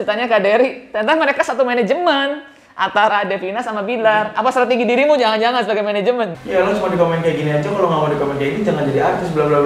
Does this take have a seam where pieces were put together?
yes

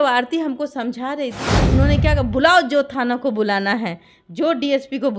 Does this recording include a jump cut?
yes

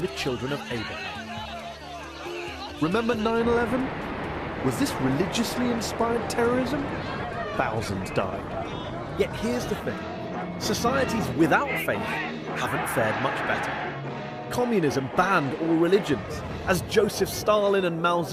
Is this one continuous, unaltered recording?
yes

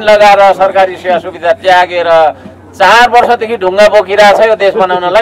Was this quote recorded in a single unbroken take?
yes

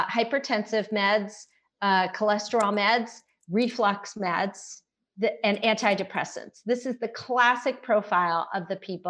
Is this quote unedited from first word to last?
yes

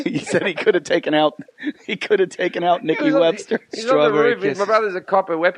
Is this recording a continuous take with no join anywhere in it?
no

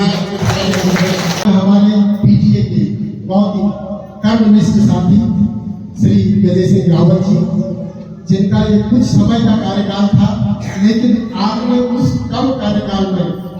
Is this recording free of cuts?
no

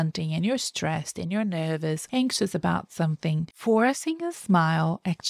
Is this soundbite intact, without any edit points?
no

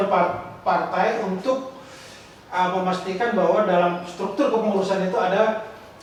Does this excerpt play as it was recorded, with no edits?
yes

